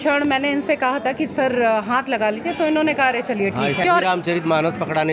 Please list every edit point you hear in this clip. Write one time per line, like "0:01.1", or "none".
0:03.8